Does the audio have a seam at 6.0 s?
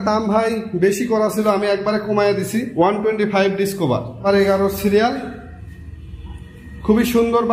no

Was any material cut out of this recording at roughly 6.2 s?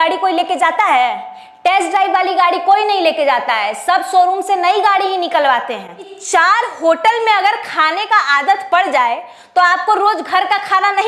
yes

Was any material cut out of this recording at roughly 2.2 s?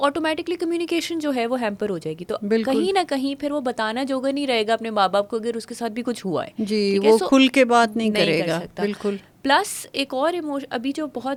no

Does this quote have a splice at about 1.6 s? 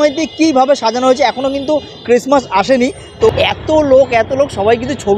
no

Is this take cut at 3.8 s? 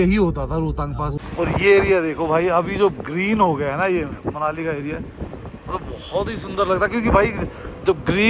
no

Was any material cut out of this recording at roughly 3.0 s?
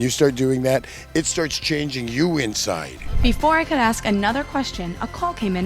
yes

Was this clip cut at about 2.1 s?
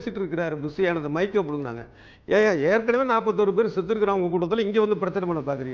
no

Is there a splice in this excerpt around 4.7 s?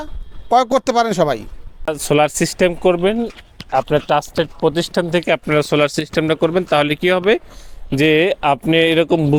no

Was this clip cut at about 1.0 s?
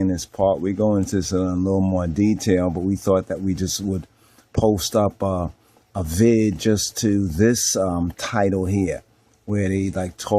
no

